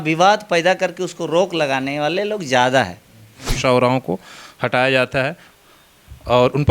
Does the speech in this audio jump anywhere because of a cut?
yes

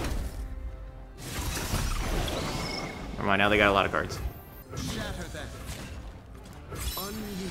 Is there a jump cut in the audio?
yes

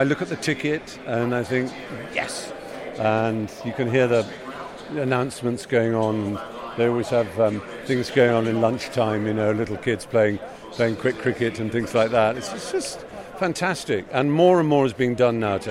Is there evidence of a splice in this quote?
no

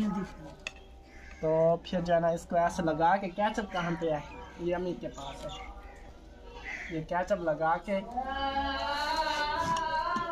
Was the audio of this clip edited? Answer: no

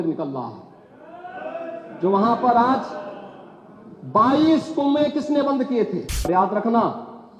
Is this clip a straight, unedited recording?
no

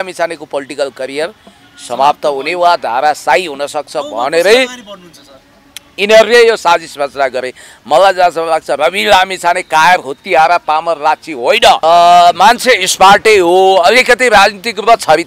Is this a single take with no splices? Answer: no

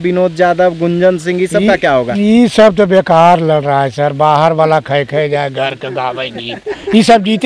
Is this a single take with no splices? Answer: yes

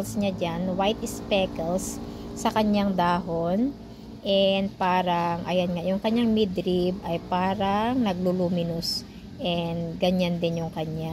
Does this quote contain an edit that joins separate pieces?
no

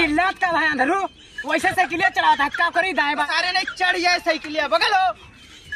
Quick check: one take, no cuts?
no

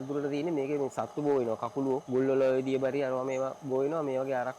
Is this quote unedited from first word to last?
no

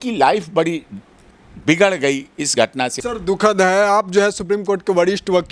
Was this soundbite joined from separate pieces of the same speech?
yes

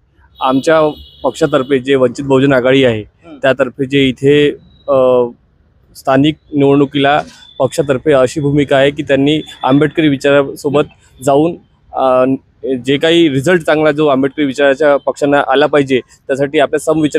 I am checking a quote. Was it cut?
no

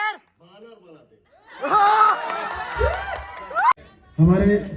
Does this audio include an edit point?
yes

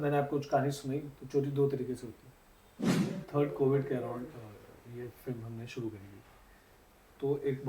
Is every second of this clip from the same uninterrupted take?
no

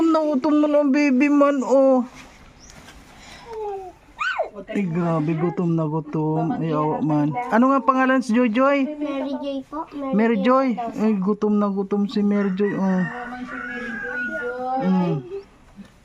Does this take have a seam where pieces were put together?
yes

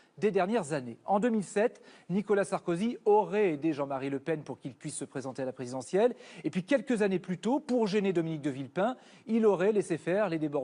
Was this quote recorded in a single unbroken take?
yes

